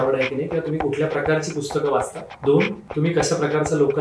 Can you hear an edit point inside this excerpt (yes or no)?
yes